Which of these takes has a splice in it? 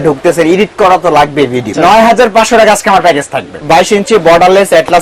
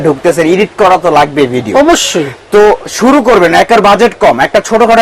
first; 2 cuts; at 1.7 s, 3.5 s

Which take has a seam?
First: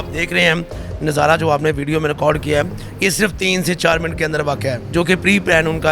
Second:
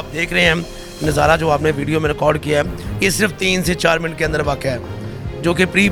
first; 1 cut; at 4.8 s

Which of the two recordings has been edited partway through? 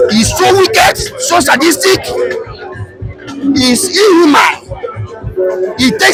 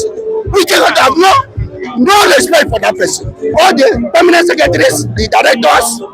second; 1 cut; at 3.5 s

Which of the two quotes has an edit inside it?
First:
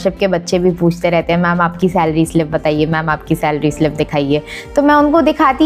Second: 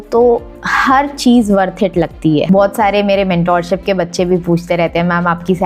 second; 1 cut; at 2.4 s

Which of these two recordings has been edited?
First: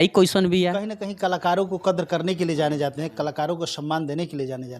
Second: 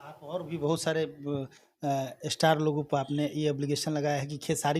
first; 1 cut; at 0.9 s

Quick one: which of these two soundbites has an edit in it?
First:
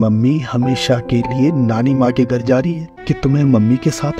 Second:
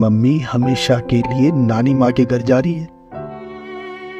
first; 1 cut; at 2.9 s

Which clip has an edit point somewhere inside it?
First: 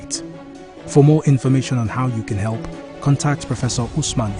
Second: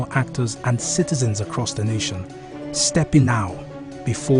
second; 1 cut; at 3.2 s

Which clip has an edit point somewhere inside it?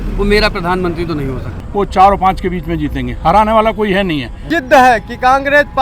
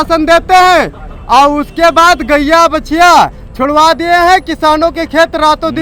first; 2 cuts; at 1.6 s, 4.4 s

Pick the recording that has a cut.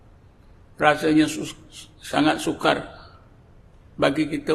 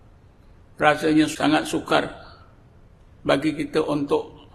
second; 1 cut; at 1.3 s

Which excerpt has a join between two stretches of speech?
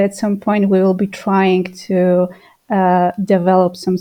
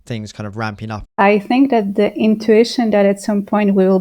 second; 1 cut; at 1.1 s

